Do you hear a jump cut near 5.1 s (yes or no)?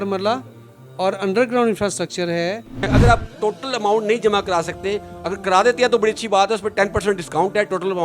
no